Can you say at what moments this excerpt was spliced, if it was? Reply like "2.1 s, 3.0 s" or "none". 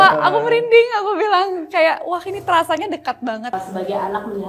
3.5 s